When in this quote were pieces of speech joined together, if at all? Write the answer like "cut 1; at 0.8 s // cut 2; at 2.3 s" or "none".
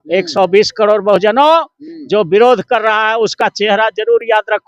none